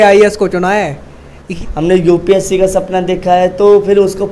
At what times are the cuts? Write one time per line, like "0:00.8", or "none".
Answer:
0:01.4